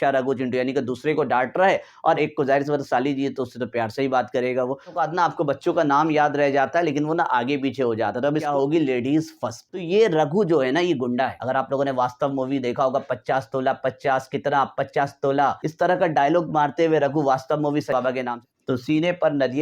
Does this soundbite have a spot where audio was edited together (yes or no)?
yes